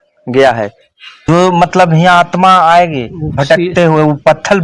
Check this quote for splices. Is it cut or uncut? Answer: cut